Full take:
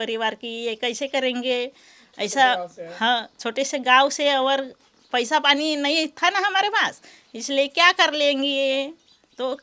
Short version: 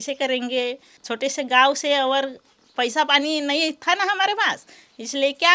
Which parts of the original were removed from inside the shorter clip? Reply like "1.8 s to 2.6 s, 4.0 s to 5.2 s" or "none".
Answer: 1.9 s to 3.4 s